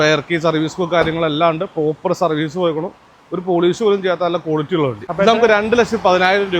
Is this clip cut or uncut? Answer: cut